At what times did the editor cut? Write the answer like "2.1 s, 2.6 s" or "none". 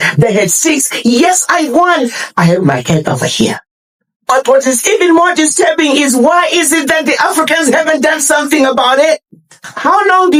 none